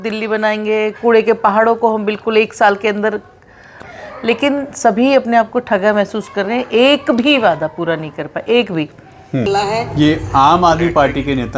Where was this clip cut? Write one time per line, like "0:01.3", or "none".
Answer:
0:03.8
0:09.5